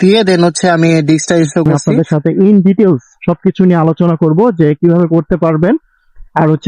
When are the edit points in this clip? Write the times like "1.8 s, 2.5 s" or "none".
1.8 s